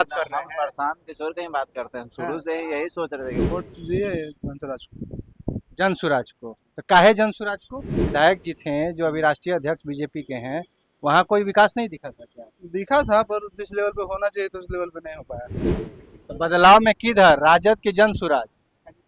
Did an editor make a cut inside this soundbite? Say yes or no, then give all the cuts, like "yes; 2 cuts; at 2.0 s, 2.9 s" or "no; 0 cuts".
yes; 3 cuts; at 3.5 s, 8.0 s, 15.7 s